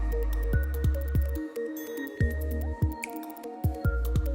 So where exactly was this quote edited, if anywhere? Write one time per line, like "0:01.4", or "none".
none